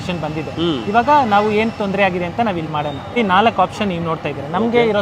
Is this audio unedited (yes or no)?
yes